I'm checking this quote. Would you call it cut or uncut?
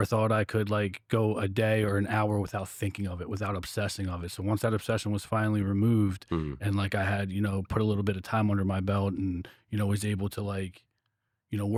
uncut